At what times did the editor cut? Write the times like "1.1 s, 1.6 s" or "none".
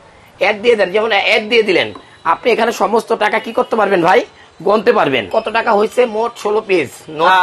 5.3 s